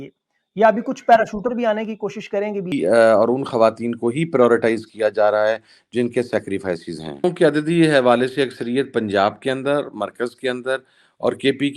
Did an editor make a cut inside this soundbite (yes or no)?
yes